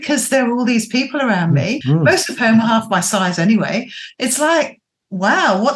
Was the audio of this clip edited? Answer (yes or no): yes